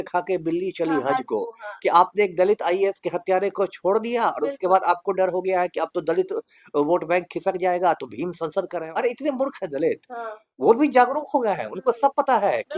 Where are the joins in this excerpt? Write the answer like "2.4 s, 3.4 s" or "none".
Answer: 8.8 s